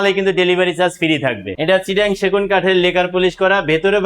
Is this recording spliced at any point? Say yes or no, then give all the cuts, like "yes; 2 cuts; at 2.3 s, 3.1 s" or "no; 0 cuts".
yes; 1 cut; at 1.5 s